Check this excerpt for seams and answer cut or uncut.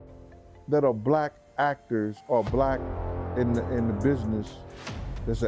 uncut